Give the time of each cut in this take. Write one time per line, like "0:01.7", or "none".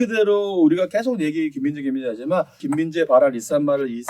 0:02.5

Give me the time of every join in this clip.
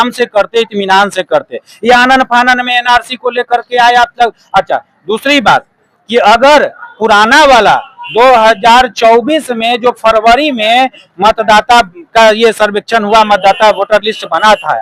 none

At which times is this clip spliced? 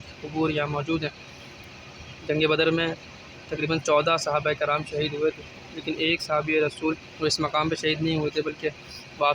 none

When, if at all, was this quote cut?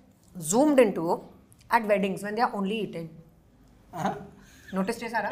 none

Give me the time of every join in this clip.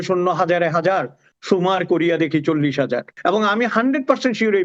0:03.1

